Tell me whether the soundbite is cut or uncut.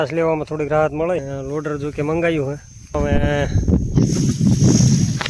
cut